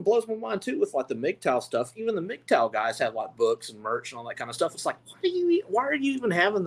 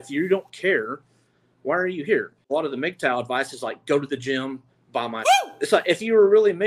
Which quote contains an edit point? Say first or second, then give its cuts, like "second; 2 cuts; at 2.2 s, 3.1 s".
second; 2 cuts; at 2.4 s, 5.3 s